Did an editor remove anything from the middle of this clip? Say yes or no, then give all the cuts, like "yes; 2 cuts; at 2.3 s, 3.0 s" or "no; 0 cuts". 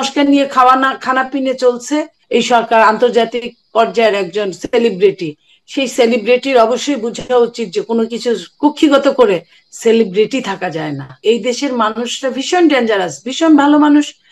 yes; 2 cuts; at 2.2 s, 11.2 s